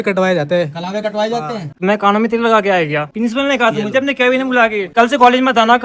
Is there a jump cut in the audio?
yes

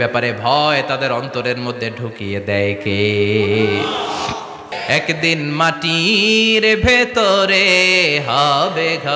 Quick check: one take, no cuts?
no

